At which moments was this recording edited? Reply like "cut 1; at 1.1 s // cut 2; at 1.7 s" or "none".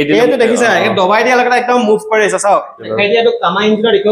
cut 1; at 2.9 s